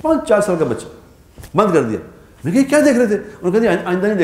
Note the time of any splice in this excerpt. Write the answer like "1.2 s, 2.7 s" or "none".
none